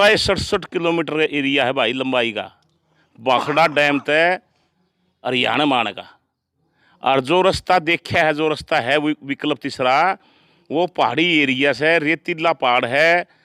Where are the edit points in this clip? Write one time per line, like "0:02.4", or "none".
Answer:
none